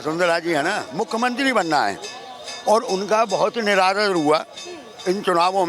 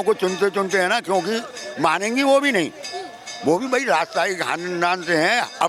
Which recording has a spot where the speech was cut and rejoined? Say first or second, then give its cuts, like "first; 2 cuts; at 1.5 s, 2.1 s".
first; 1 cut; at 0.9 s